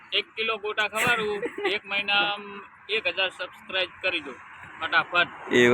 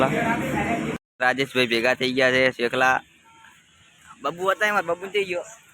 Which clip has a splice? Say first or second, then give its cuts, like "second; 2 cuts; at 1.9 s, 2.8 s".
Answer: second; 1 cut; at 1.0 s